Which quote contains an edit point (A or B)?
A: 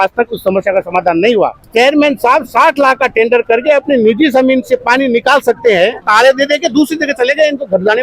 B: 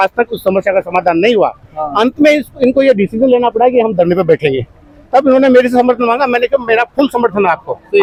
A